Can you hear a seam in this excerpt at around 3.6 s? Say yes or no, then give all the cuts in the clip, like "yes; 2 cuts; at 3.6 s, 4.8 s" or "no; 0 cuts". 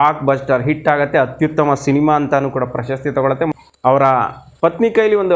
yes; 1 cut; at 3.6 s